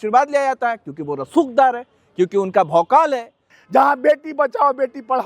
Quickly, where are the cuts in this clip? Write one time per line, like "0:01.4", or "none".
0:03.5